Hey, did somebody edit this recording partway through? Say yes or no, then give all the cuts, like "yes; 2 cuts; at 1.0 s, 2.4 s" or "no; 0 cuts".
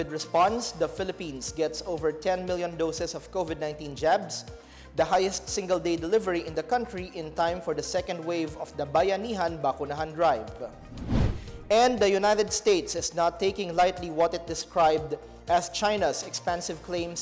no; 0 cuts